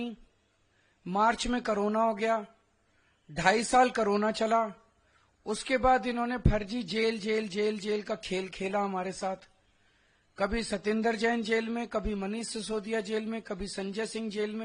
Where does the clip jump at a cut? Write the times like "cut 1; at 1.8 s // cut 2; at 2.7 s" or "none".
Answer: none